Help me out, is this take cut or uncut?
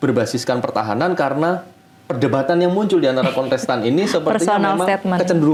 uncut